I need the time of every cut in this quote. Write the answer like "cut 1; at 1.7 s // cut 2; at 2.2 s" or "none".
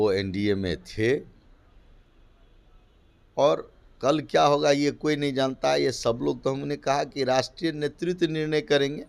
none